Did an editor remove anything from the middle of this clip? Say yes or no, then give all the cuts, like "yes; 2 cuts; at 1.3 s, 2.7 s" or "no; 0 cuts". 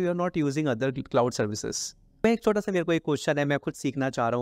yes; 1 cut; at 2.2 s